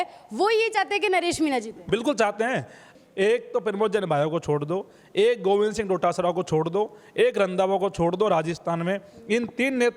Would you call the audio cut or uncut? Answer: cut